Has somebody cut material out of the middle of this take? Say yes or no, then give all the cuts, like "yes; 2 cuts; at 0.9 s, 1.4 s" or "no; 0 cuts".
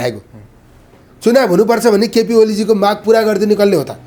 no; 0 cuts